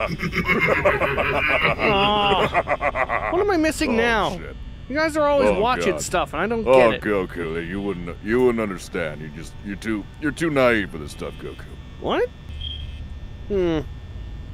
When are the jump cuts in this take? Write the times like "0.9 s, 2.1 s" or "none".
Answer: none

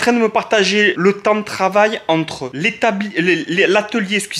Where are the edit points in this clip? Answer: 0.9 s

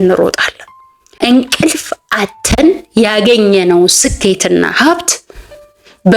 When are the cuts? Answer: 1.2 s

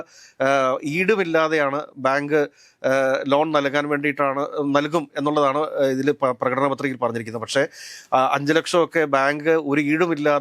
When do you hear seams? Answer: none

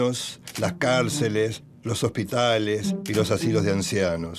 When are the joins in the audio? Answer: 1.5 s

